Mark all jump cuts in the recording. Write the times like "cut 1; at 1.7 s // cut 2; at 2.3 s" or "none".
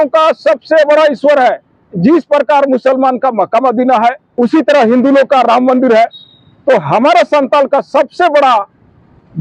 cut 1; at 4.2 s

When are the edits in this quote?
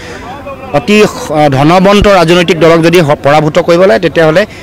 none

